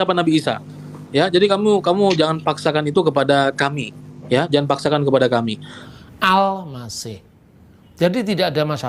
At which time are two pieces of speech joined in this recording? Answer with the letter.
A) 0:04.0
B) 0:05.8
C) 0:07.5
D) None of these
B